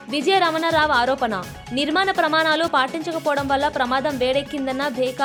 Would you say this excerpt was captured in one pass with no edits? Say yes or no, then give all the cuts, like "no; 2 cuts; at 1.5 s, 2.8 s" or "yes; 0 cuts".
yes; 0 cuts